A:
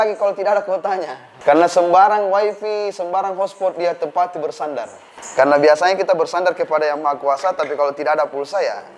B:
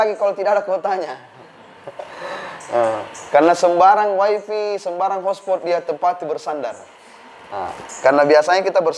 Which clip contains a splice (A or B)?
A